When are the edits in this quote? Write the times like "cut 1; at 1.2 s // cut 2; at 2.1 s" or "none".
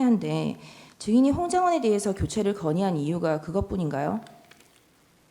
none